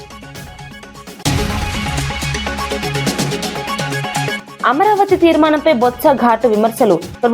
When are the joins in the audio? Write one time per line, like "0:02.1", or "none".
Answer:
0:01.1
0:04.4